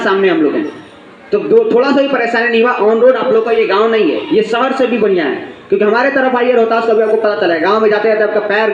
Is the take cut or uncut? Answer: uncut